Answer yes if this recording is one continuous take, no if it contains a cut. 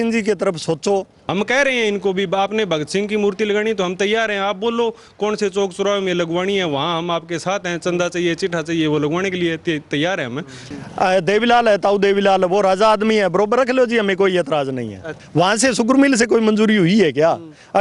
no